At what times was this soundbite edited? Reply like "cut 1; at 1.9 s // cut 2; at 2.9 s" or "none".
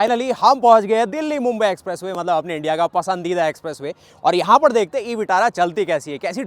none

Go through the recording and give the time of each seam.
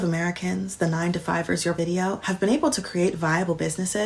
cut 1; at 1.8 s

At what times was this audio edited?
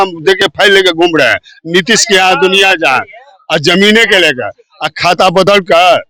none

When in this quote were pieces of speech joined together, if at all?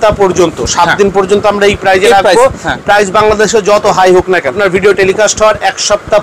cut 1; at 4.6 s

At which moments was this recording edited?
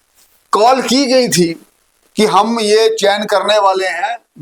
none

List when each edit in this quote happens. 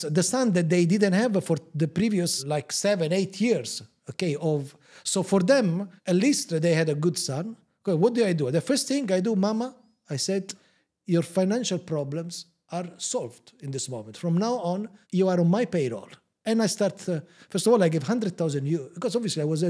cut 1; at 2.4 s

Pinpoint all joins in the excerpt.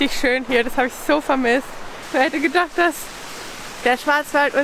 cut 1; at 2.0 s

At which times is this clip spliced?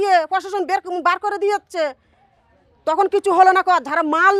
none

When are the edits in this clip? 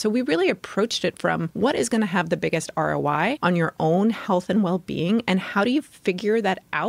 cut 1; at 1.5 s // cut 2; at 3.4 s

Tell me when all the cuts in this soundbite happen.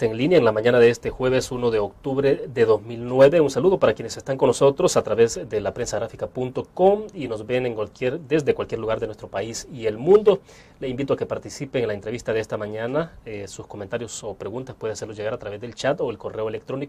cut 1; at 1.5 s

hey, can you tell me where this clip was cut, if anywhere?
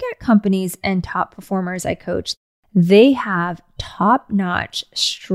cut 1; at 2.3 s

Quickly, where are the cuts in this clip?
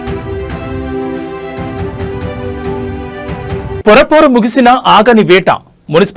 cut 1; at 3.3 s

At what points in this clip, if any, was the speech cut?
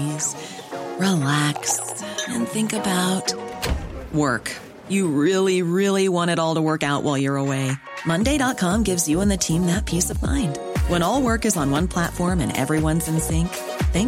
none

